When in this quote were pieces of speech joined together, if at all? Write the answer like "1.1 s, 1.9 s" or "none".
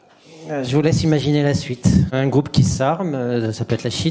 2.1 s